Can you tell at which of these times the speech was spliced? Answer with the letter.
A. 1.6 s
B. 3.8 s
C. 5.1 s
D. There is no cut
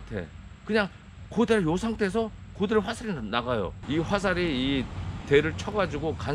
B